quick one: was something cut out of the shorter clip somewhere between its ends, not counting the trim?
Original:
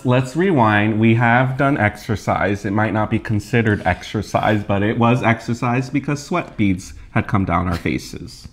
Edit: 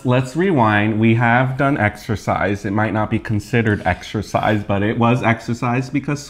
no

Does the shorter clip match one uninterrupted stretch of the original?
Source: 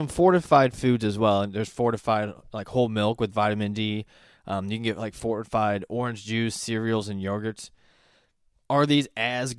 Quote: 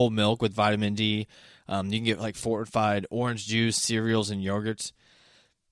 yes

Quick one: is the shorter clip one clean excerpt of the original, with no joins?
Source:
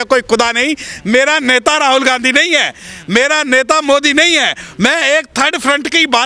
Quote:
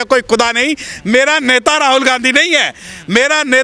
yes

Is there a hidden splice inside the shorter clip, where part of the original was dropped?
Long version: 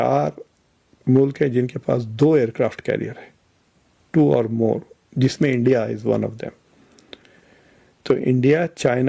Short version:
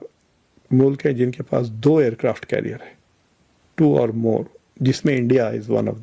no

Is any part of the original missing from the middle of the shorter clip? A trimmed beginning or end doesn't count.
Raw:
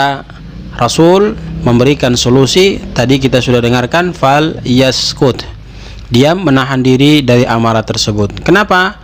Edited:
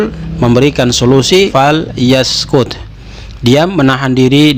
yes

